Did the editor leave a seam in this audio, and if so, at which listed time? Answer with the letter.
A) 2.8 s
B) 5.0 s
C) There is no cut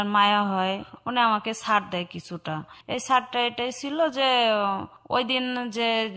A